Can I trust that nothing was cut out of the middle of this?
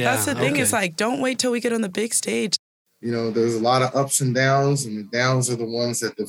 no; 1 cut; at 2.5 s

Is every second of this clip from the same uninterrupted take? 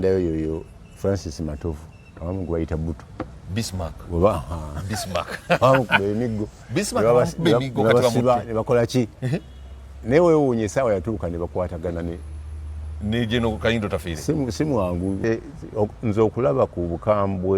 no; 1 cut; at 15.2 s

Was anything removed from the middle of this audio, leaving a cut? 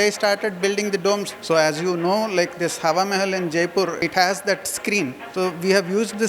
yes; 3 cuts; at 1.3 s, 4.0 s, 5.2 s

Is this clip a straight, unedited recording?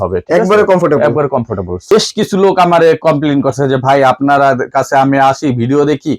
no; 1 cut; at 1.8 s

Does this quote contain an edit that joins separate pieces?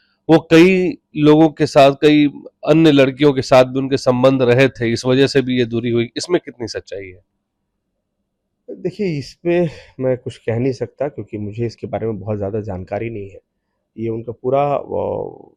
no; 0 cuts

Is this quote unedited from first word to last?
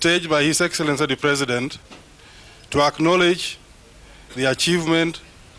yes; 0 cuts

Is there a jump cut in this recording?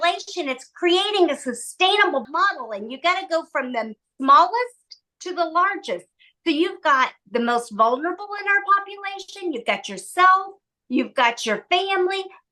yes; 2 cuts; at 2.2 s, 4.0 s

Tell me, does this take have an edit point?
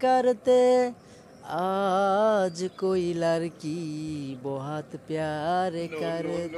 no; 0 cuts

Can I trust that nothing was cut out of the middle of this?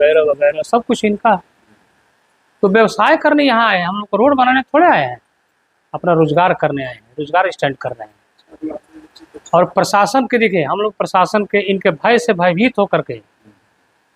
yes; 0 cuts

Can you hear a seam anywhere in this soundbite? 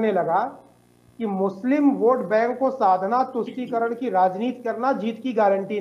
no; 0 cuts

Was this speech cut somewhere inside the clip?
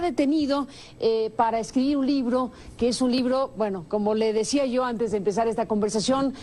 yes; 1 cut; at 1.4 s

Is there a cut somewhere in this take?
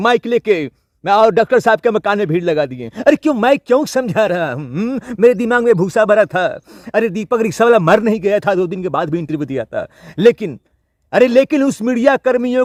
no; 0 cuts

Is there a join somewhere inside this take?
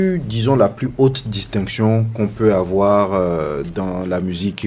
no; 0 cuts

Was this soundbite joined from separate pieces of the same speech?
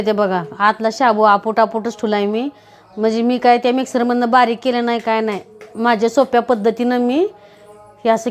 no; 0 cuts

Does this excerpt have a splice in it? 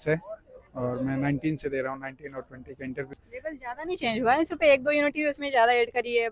yes; 1 cut; at 3.5 s

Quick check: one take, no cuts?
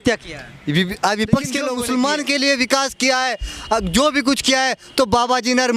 no; 1 cut; at 1.7 s

